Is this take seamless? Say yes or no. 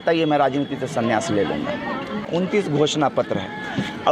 no